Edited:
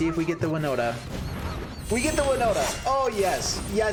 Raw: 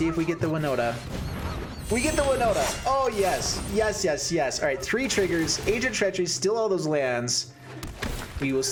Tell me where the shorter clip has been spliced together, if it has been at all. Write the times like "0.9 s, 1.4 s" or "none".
none